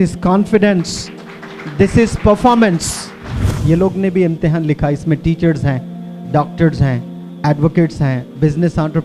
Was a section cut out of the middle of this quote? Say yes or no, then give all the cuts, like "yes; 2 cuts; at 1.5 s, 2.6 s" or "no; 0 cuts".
yes; 1 cut; at 3.5 s